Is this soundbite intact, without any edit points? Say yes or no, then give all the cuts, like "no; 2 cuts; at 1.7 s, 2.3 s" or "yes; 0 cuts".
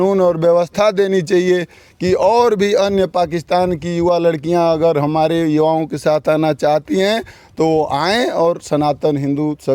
yes; 0 cuts